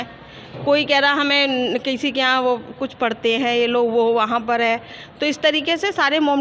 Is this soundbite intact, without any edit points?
yes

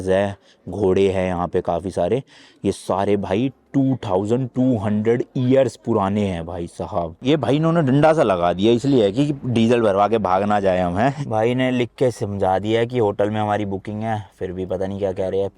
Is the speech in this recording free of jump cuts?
no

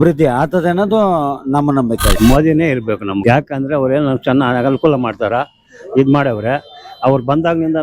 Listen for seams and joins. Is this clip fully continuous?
no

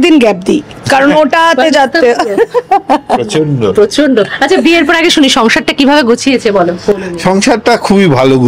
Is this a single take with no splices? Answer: yes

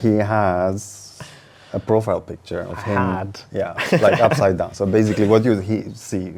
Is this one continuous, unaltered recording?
yes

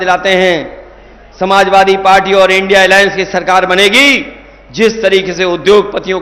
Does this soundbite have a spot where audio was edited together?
no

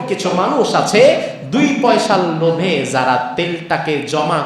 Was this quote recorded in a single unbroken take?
yes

